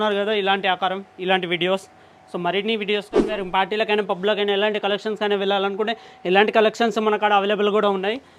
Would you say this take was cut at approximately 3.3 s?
yes; 1 cut; at 3.3 s

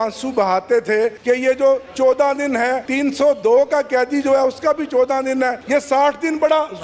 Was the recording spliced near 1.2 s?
yes; 3 cuts; at 1.2 s, 2.8 s, 5.6 s

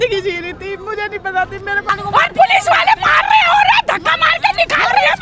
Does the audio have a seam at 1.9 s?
yes; 1 cut; at 1.9 s

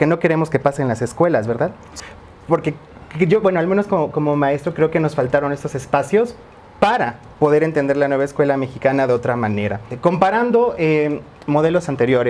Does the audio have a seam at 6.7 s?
no; 2 cuts; at 1.9 s, 9.9 s

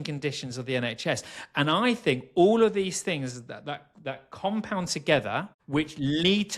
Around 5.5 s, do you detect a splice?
yes; 1 cut; at 5.5 s

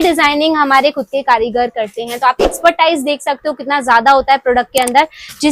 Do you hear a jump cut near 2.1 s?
no; 0 cuts

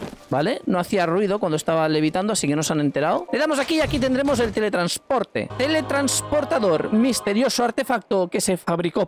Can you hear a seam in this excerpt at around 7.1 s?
no; 2 cuts; at 3.3 s, 5.5 s

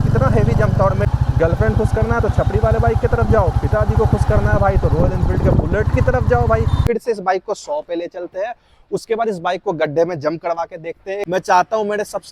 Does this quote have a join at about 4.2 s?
no; 3 cuts; at 1.0 s, 6.8 s, 11.2 s

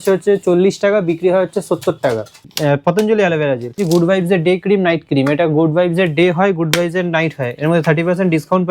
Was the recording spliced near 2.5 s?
yes; 2 cuts; at 2.5 s, 3.8 s

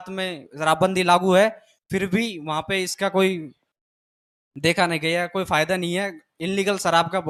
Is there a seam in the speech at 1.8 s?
no; 0 cuts

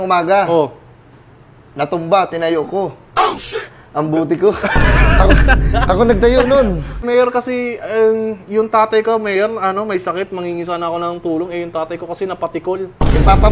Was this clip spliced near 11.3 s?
no; 1 cut; at 7.0 s

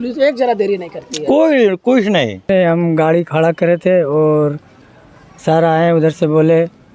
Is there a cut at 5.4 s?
no; 1 cut; at 2.5 s

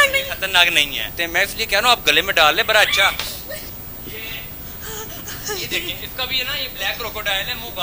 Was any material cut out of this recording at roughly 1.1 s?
yes; 2 cuts; at 1.1 s, 3.7 s

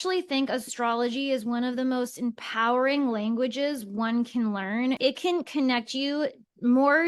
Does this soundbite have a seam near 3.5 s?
no; 1 cut; at 5.0 s

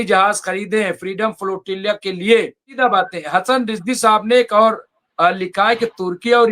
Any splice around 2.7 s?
yes; 1 cut; at 2.7 s

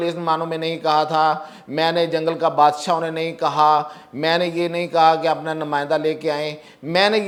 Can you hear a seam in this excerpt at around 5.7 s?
no; 0 cuts

